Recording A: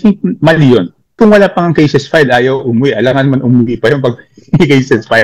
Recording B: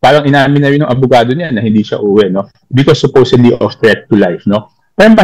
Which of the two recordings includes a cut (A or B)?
A